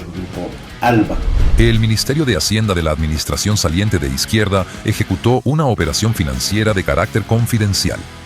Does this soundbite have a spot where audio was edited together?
yes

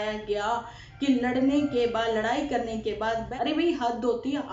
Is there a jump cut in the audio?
yes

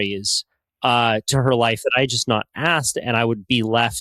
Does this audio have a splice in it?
no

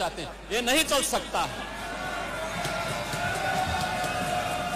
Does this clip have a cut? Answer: no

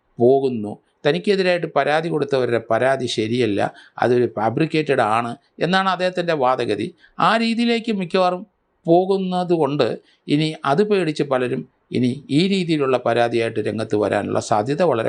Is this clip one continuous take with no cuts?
yes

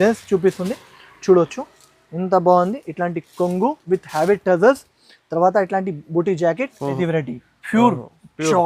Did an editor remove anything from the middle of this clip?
yes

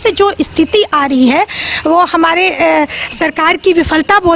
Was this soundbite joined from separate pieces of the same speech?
no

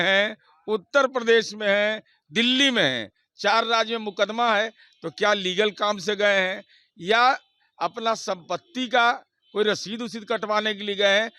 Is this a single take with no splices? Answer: yes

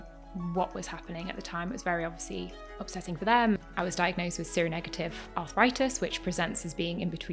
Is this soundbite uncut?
no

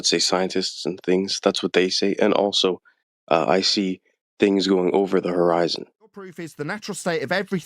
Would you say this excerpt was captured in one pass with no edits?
no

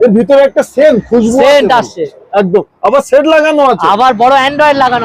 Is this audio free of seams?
yes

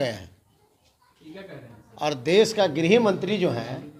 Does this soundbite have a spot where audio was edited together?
no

